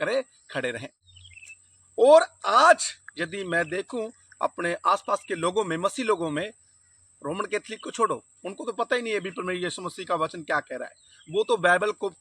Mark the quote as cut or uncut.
cut